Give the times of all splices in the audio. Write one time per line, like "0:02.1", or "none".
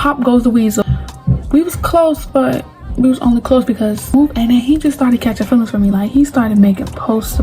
0:00.8
0:04.1